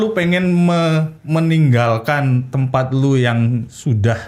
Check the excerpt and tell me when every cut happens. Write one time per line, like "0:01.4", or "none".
none